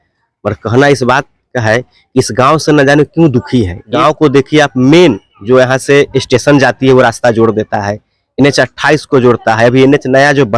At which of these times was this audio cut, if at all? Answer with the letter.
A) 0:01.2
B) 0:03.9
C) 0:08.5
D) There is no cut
B